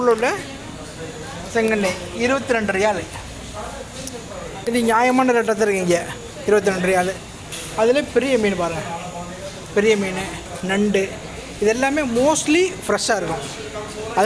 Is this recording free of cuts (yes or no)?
yes